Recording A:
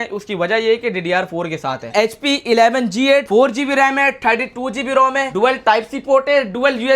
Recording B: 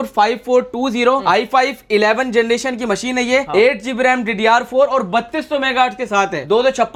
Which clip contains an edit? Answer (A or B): A